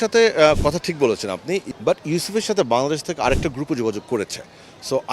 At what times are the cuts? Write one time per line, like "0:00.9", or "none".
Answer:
0:01.7